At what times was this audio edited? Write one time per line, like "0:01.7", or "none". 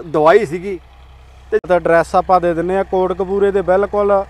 0:01.6